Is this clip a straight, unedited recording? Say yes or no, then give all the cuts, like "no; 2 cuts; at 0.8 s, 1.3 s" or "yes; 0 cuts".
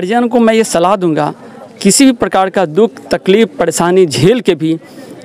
yes; 0 cuts